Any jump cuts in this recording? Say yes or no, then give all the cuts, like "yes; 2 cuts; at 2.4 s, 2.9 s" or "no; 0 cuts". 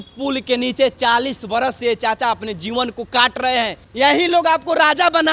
yes; 1 cut; at 3.8 s